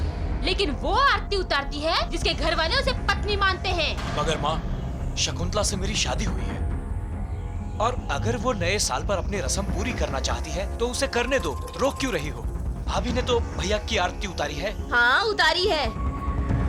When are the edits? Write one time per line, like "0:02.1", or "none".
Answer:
none